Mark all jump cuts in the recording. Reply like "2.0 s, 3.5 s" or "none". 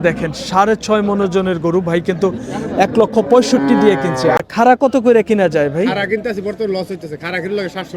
4.4 s